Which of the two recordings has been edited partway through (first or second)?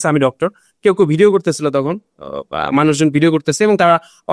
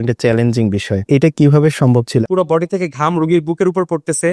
second